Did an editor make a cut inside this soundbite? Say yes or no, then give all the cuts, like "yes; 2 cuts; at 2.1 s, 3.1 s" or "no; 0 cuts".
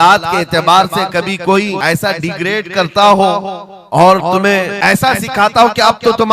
yes; 2 cuts; at 1.8 s, 4.7 s